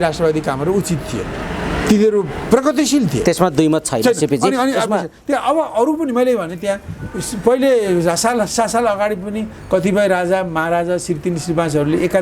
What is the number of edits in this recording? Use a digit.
0